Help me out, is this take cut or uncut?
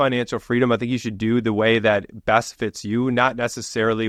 uncut